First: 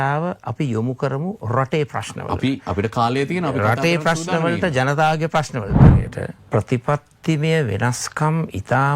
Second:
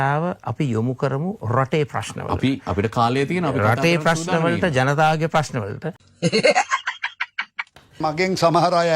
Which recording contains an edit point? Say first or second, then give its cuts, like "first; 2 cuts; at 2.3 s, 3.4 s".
first; 1 cut; at 6.1 s